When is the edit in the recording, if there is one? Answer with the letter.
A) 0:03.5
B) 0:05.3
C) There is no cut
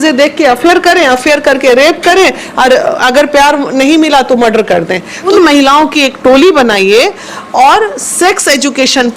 B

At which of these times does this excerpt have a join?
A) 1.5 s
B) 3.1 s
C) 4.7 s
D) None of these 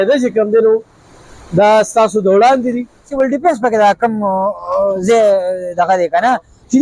B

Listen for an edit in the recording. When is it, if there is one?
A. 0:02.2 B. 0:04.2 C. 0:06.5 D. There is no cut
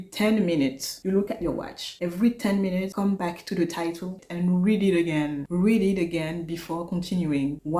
B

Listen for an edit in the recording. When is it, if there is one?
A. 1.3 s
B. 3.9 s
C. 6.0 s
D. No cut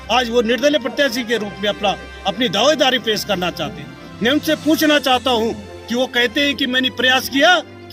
D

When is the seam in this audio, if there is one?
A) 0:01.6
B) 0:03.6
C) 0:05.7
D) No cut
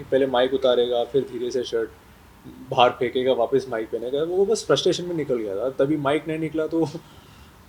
D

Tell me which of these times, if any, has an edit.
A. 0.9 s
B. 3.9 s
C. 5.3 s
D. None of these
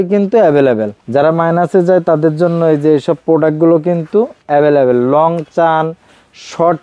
A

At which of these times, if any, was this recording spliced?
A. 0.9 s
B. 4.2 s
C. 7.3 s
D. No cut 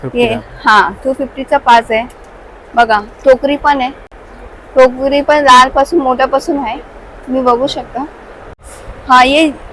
D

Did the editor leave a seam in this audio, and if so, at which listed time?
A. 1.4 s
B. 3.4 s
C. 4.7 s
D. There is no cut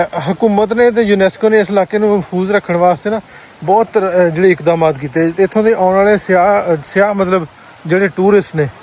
D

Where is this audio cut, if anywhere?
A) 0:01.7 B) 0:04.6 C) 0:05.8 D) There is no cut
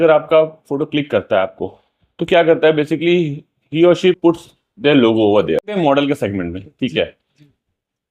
C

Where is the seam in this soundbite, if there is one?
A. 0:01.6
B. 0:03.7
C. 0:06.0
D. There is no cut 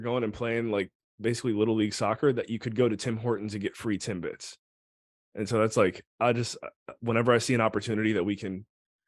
D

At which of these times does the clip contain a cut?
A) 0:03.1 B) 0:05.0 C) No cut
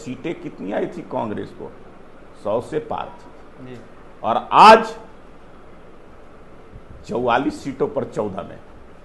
C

